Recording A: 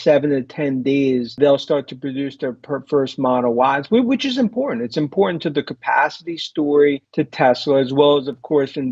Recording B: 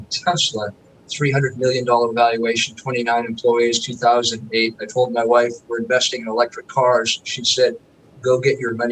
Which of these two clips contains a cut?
A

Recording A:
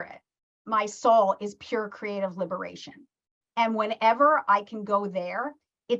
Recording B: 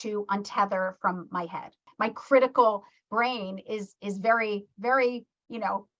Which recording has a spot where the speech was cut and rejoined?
B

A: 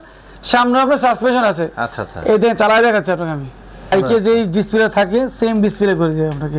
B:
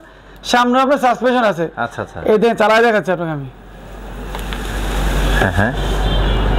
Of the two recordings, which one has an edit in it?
A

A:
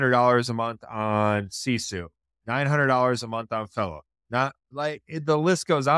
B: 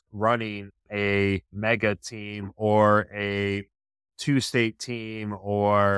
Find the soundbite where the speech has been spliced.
B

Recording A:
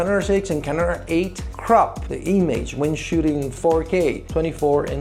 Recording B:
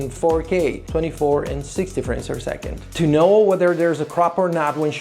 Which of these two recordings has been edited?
B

